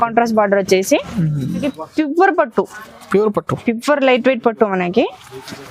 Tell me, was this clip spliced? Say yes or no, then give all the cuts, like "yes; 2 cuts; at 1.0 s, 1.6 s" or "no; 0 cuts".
yes; 1 cut; at 1.7 s